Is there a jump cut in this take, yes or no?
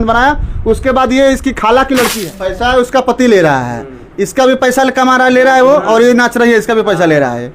yes